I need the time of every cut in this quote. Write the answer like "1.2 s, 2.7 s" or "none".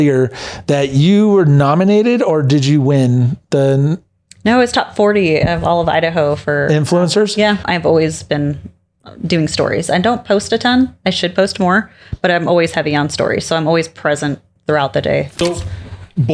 7.7 s, 15.3 s